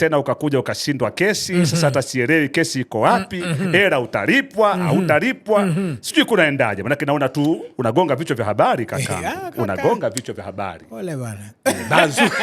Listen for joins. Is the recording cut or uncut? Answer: uncut